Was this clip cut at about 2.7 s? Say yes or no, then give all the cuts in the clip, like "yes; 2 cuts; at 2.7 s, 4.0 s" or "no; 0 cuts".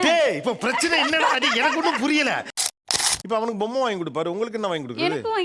yes; 1 cut; at 2.7 s